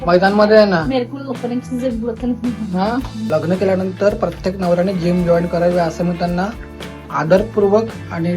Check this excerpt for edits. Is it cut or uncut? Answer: cut